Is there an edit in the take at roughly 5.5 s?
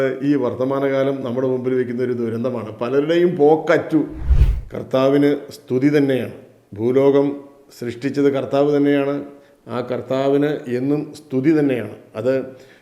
no; 1 cut; at 4.2 s

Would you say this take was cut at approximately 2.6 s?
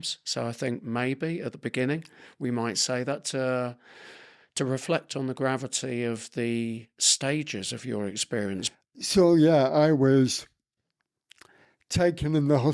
no; 1 cut; at 8.7 s

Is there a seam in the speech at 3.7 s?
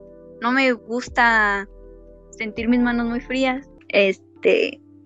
yes; 1 cut; at 3.7 s

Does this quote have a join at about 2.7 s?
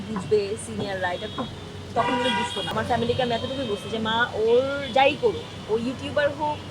yes; 1 cut; at 2.7 s

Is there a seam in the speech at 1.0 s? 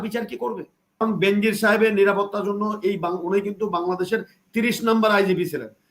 yes; 1 cut; at 1.0 s

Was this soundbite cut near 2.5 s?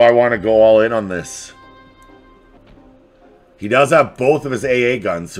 yes; 1 cut; at 2.5 s

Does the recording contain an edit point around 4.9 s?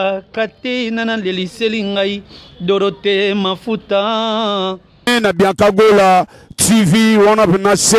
yes; 1 cut; at 4.9 s

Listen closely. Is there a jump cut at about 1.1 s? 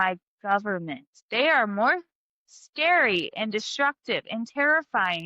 yes; 1 cut; at 1.1 s

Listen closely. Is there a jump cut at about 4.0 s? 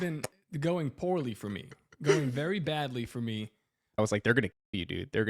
yes; 1 cut; at 4.0 s

